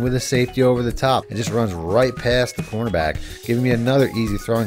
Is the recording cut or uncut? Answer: cut